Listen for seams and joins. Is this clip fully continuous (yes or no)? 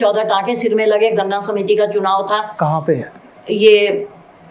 yes